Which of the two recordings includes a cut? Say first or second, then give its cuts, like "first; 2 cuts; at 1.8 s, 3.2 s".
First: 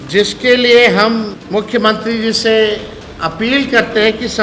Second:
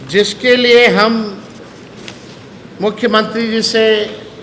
first; 1 cut; at 1.4 s